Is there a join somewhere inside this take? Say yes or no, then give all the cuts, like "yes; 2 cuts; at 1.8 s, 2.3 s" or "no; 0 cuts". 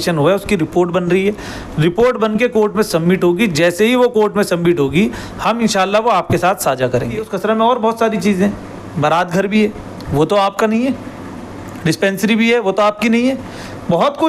yes; 1 cut; at 7.3 s